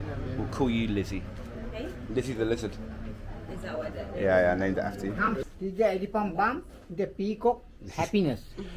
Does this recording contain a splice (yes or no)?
yes